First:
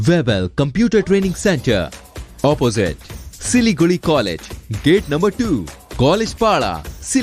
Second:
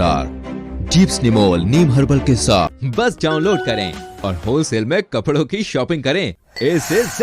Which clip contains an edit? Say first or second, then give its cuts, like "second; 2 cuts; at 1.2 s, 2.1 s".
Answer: second; 1 cut; at 2.8 s